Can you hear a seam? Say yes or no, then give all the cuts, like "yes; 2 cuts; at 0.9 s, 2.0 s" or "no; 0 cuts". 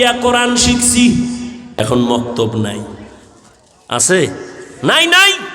yes; 1 cut; at 1.6 s